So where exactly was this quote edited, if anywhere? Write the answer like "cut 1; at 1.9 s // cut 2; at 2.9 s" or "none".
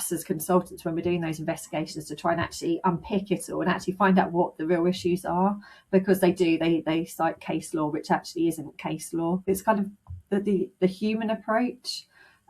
cut 1; at 9.4 s